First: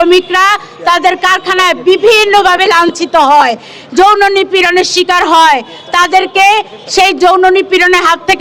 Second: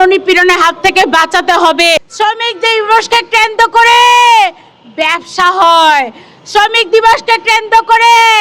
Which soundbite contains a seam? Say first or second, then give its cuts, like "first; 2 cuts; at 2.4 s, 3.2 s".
second; 1 cut; at 1.9 s